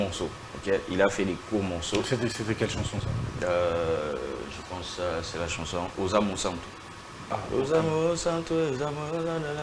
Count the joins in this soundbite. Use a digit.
0